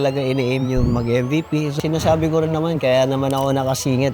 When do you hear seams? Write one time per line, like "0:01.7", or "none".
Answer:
0:01.7